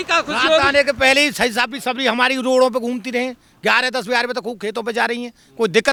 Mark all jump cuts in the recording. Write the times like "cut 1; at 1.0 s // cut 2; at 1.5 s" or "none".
none